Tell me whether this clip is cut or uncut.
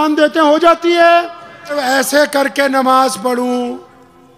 cut